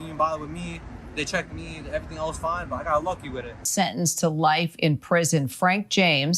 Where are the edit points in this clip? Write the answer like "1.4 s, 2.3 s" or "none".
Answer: 3.7 s